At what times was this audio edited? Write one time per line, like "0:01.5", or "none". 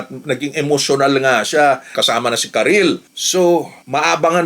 0:02.0
0:03.1